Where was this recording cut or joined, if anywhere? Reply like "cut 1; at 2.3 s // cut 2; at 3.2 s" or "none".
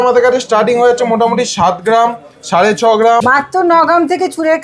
cut 1; at 3.2 s